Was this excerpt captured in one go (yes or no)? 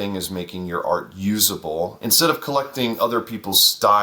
no